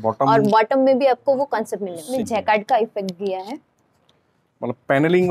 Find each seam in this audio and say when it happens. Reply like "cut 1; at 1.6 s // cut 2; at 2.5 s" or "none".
cut 1; at 2.0 s